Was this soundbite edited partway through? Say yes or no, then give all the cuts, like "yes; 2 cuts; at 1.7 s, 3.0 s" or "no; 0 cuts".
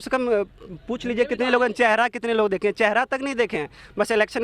no; 0 cuts